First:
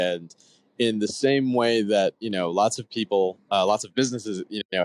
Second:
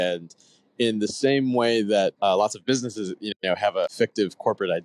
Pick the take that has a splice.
second; 2 cuts; at 2.1 s, 3.9 s

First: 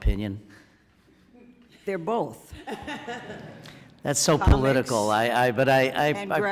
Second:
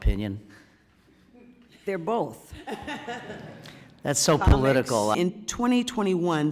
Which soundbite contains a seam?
second; 1 cut; at 5.1 s

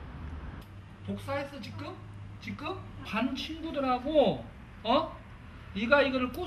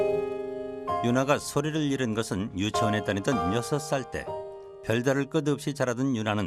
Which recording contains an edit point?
first; 1 cut; at 2.9 s

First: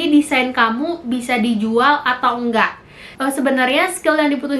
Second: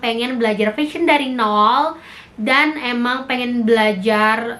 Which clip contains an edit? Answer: first; 1 cut; at 3.2 s

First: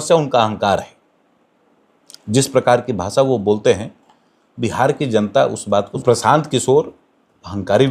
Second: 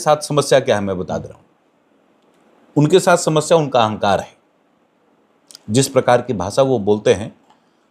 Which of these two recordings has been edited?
first; 1 cut; at 5.9 s

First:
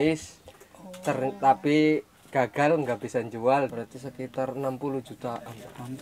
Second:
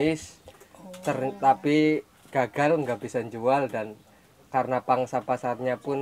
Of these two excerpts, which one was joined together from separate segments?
first; 1 cut; at 3.7 s

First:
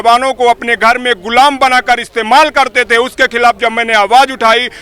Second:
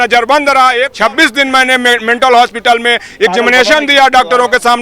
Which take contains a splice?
second; 1 cut; at 0.9 s

